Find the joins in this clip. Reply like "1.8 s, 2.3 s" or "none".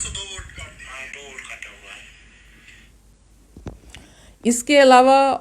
none